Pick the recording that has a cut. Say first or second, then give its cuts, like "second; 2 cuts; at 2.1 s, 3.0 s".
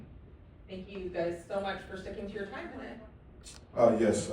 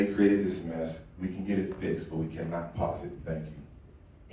first; 1 cut; at 2.7 s